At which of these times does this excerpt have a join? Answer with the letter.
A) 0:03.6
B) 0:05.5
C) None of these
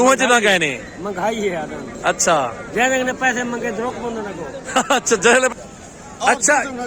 B